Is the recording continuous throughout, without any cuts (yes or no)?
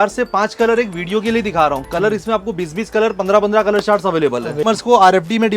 no